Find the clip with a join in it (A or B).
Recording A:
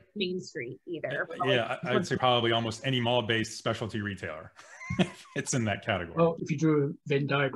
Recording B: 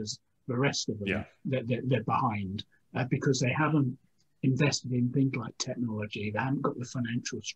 A